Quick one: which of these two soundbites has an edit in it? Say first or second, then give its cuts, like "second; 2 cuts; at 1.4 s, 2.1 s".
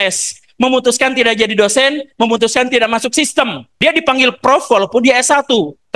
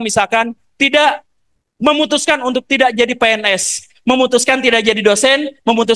first; 1 cut; at 3.6 s